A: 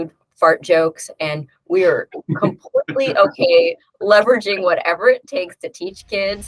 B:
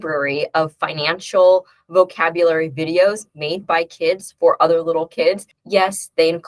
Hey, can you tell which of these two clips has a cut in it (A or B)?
B